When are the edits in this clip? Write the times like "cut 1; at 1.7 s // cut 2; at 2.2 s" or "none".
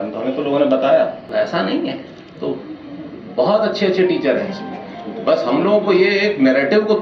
cut 1; at 1.3 s

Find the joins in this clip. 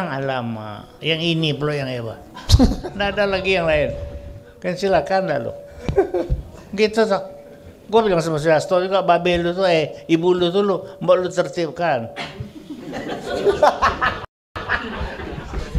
none

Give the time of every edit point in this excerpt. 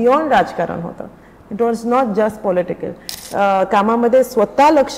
cut 1; at 3.1 s

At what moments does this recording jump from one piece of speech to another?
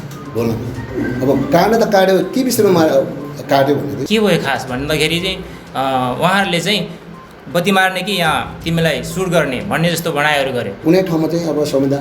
cut 1; at 4.0 s // cut 2; at 10.8 s

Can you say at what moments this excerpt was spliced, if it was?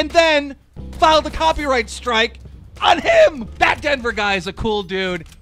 cut 1; at 3.5 s

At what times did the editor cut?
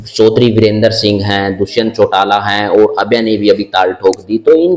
none

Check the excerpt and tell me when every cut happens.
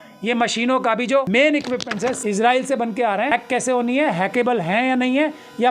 cut 1; at 1.3 s // cut 2; at 2.2 s // cut 3; at 3.3 s

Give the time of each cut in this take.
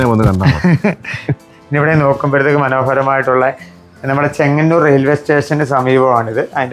cut 1; at 1.6 s

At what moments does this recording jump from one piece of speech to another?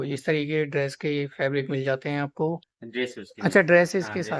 cut 1; at 2.8 s

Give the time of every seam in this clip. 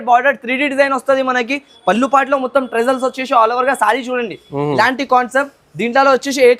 none

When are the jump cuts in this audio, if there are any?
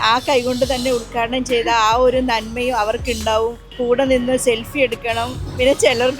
cut 1; at 3.7 s

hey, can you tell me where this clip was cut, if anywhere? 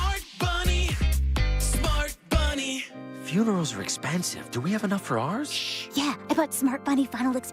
cut 1; at 2.7 s

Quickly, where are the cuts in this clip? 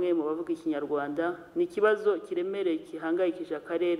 none

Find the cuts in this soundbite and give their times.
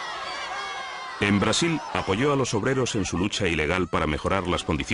cut 1; at 3.1 s

